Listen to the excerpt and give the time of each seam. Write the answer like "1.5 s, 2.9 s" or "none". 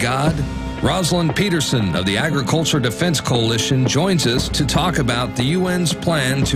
2.9 s